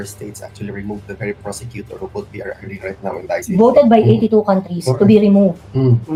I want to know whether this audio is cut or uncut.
uncut